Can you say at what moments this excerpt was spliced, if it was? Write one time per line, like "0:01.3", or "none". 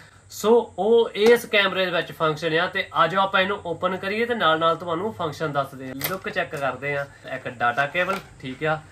0:05.9
0:07.3